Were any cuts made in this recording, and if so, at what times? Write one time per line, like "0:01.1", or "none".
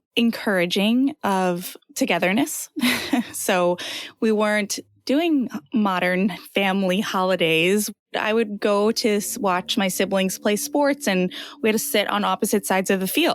none